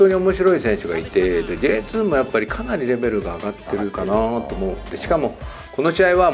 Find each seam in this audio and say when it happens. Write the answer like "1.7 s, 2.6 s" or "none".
none